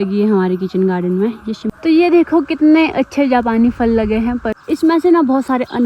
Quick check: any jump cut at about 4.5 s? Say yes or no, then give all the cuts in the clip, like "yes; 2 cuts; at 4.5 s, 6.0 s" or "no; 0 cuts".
yes; 2 cuts; at 1.6 s, 4.5 s